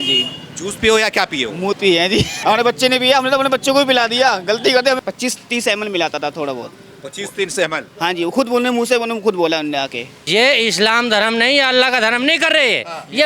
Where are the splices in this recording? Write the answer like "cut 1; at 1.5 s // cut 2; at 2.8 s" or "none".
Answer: cut 1; at 2.3 s // cut 2; at 5.0 s // cut 3; at 10.1 s